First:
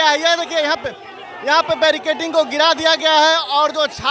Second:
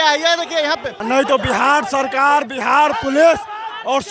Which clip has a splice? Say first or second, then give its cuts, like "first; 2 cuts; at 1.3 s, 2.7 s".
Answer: second; 1 cut; at 0.9 s